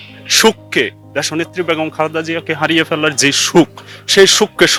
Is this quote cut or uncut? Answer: uncut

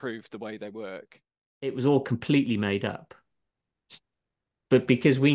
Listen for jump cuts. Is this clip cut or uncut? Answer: cut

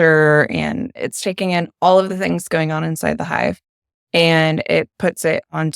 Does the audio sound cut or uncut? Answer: cut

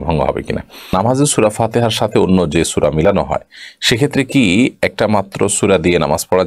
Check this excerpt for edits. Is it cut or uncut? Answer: cut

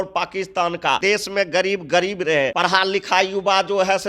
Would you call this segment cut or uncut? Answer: cut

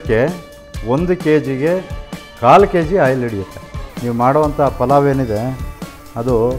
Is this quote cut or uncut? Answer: cut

